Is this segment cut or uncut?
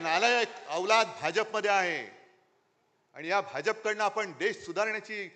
uncut